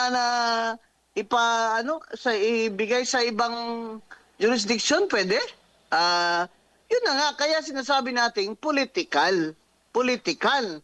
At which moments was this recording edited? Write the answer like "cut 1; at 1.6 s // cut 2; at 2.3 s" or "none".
none